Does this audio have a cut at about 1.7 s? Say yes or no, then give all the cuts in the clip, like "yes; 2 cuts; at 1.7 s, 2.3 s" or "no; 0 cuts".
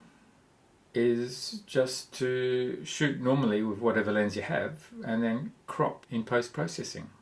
no; 1 cut; at 6.0 s